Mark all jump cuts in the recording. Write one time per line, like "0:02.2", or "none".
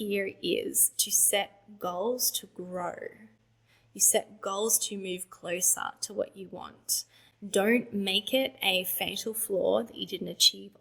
none